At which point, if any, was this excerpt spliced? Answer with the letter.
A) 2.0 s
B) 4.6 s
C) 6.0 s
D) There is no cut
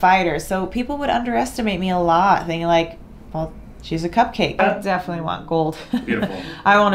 B